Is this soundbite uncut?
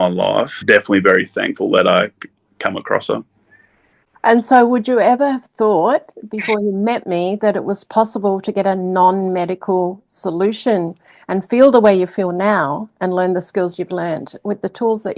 yes; 0 cuts

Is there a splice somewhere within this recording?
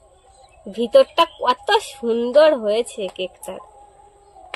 no; 0 cuts

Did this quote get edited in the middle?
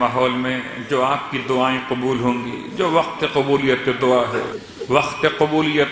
yes; 1 cut; at 4.6 s

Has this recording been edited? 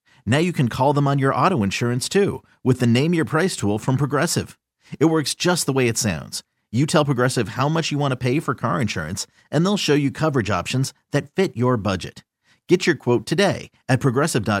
no; 0 cuts

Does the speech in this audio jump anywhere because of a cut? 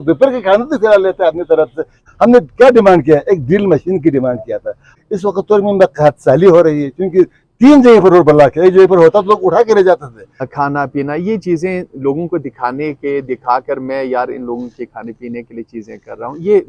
yes; 3 cuts; at 2.0 s, 4.9 s, 10.5 s

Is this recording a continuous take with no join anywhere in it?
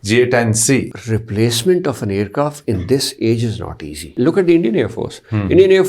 no; 2 cuts; at 0.9 s, 4.2 s

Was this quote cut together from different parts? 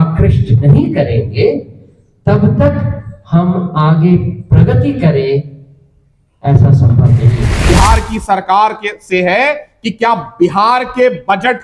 yes; 1 cut; at 7.5 s

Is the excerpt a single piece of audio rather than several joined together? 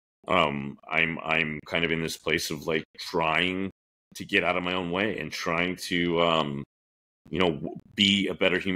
no; 1 cut; at 7.8 s

